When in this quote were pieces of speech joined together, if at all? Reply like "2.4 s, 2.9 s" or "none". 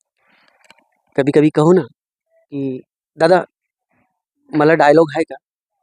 none

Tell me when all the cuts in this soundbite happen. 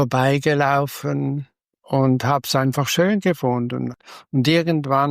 3.9 s

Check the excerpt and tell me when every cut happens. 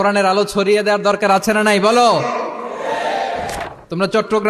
3.5 s

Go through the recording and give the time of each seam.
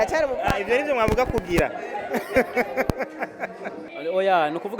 3.8 s

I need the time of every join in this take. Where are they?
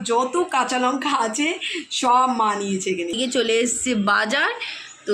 3.2 s

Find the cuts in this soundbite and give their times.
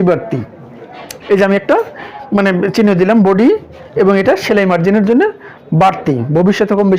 none

